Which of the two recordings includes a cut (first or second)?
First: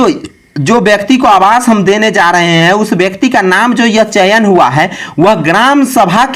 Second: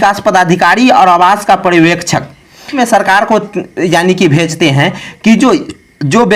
second